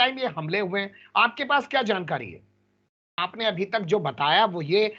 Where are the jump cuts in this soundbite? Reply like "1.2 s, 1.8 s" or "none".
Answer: 3.2 s